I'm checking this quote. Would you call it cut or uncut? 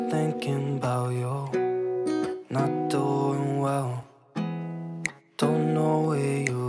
uncut